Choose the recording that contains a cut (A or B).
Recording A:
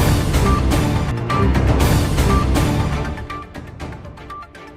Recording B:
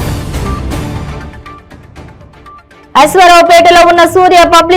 B